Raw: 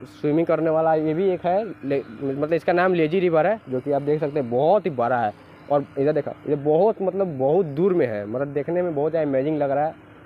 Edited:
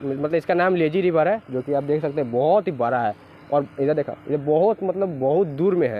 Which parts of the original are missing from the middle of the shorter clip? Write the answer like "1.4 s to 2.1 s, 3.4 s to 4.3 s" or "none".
none